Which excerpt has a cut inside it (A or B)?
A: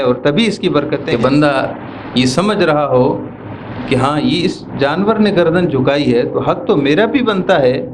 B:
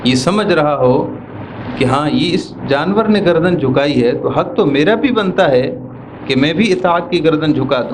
A